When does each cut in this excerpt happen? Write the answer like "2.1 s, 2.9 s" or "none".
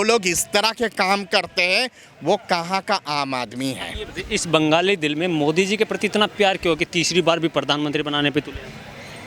none